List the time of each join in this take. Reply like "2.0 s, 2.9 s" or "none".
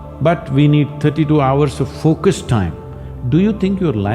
none